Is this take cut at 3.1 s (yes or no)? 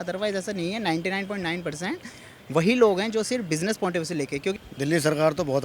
no